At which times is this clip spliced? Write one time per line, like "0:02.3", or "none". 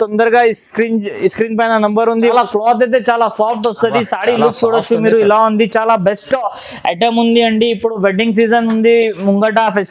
0:02.3